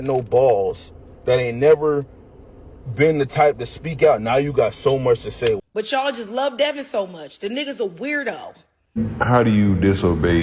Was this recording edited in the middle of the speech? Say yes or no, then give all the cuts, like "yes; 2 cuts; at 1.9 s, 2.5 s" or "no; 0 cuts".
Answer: yes; 2 cuts; at 5.6 s, 9.0 s